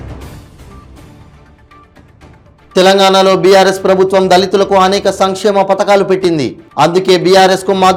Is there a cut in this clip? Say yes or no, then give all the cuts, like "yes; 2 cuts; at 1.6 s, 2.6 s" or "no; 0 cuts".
no; 0 cuts